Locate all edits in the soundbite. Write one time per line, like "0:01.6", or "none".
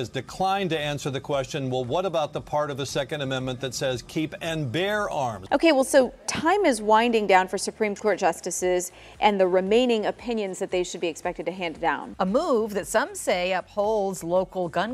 0:05.4
0:12.2